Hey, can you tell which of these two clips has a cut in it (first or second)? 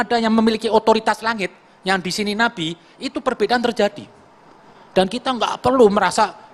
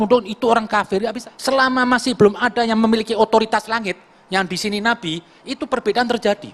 second